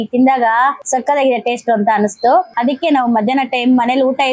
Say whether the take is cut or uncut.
cut